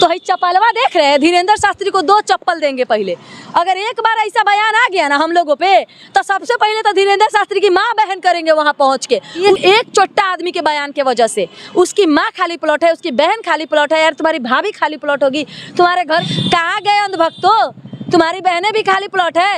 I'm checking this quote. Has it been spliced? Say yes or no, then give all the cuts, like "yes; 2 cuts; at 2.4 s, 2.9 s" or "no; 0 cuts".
yes; 2 cuts; at 9.5 s, 16.3 s